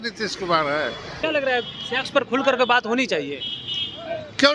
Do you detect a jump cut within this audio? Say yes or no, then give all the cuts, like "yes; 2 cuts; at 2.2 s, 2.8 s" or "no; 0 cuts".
yes; 1 cut; at 1.2 s